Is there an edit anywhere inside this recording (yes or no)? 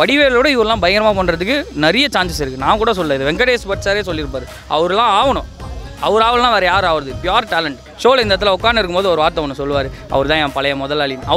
yes